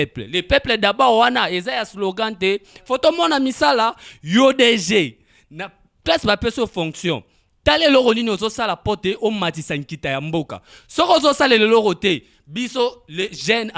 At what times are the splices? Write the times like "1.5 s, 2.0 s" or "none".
none